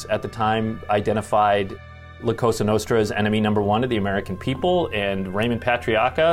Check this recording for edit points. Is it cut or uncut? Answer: uncut